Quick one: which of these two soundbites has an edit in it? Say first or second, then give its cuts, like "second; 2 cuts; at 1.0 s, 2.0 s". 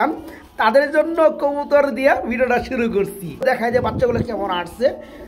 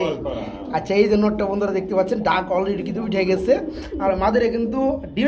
first; 1 cut; at 3.5 s